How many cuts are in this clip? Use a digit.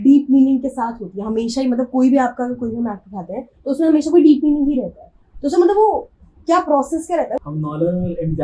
1